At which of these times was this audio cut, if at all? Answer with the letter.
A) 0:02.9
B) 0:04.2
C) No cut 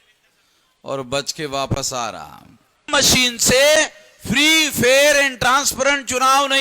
A